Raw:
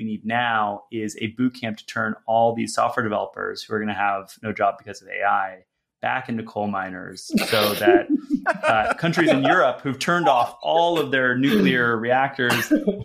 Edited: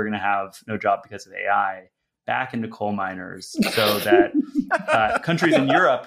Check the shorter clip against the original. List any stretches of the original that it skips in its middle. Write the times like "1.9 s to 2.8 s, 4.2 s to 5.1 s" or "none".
none